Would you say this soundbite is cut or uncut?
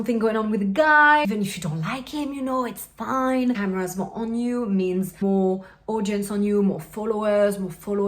cut